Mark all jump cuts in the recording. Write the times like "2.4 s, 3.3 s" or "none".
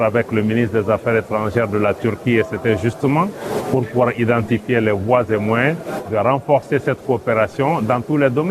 none